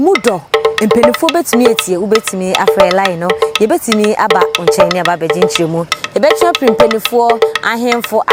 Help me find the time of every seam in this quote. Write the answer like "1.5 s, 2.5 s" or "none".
none